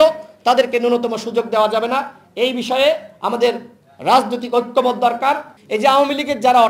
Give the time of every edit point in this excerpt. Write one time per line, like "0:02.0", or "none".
0:05.5

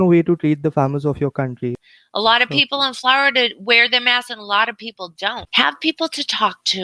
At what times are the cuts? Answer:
0:01.8
0:05.4

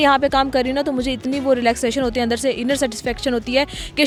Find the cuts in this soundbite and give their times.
none

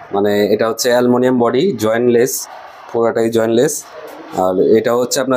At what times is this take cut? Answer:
none

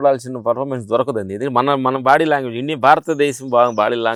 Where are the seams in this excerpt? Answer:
none

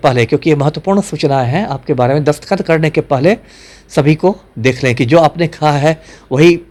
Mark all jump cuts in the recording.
none

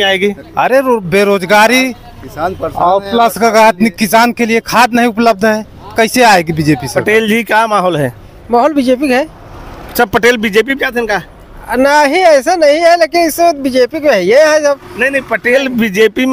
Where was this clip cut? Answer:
0:06.9

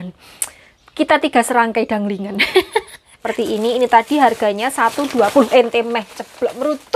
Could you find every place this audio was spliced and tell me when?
0:03.2

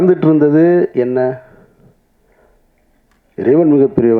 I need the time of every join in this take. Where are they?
none

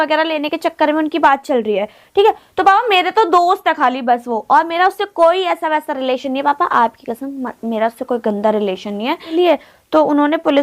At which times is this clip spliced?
0:09.3

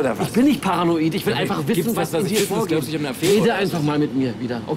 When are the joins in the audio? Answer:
0:01.5

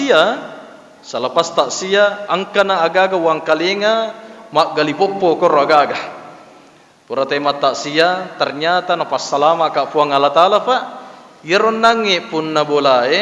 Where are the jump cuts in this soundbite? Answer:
none

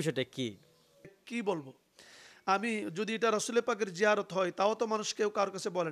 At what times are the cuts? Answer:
0:01.2

